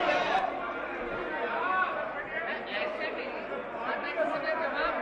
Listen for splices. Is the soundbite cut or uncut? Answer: uncut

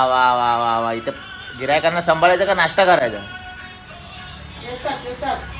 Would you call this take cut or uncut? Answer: uncut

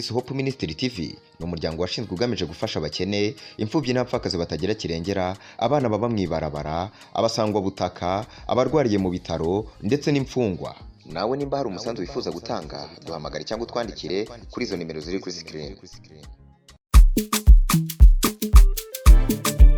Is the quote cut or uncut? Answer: uncut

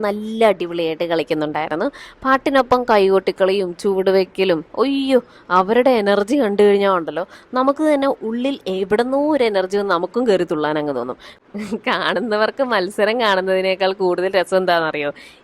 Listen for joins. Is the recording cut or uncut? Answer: cut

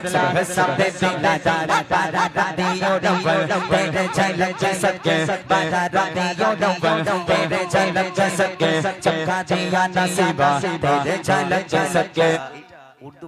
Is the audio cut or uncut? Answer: cut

